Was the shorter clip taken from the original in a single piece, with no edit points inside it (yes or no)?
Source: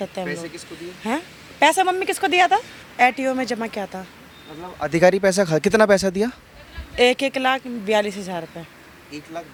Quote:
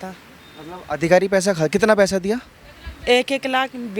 yes